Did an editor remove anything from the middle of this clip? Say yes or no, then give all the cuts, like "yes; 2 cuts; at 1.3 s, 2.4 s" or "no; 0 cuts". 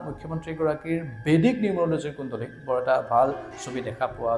no; 0 cuts